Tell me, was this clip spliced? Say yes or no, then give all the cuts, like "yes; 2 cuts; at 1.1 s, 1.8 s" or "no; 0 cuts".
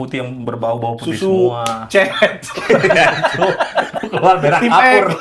no; 0 cuts